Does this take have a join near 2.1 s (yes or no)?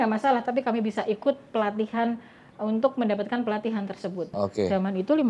no